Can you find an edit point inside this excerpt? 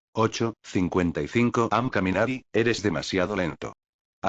yes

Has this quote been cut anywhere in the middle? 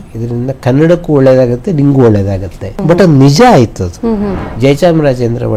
yes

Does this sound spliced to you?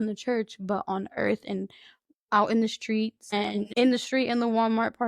yes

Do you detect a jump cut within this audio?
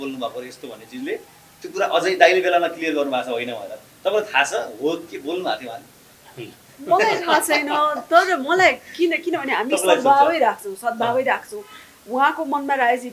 no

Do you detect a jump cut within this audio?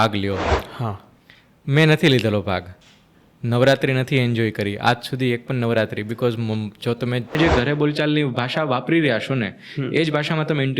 yes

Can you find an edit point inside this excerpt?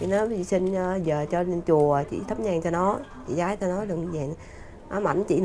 no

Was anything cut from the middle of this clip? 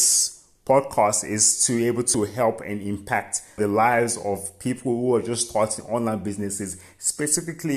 yes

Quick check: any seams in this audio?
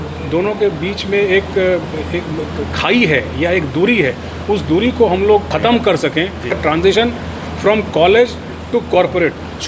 yes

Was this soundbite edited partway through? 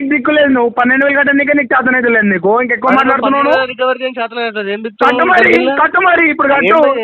no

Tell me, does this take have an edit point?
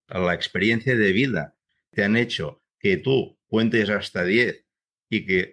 yes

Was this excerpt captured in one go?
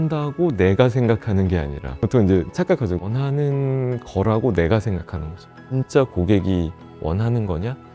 no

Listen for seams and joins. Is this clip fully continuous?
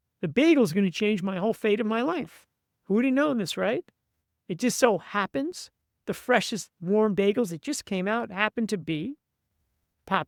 yes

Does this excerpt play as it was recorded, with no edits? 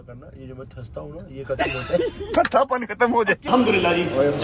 no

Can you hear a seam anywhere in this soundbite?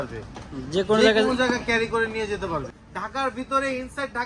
yes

